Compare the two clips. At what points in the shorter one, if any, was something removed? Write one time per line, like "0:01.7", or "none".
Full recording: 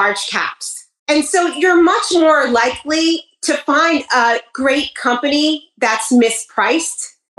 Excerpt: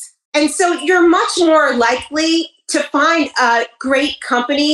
none